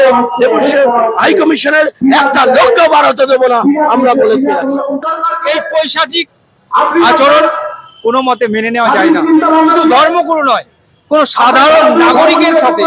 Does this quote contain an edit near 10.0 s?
no; 1 cut; at 5.0 s

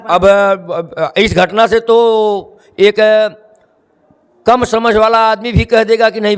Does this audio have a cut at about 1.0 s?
no; 0 cuts

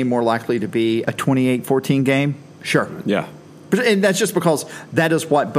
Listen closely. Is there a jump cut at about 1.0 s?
yes; 1 cut; at 1.0 s

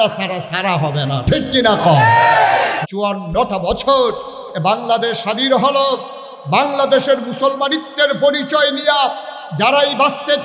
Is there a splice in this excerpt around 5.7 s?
no; 1 cut; at 2.8 s

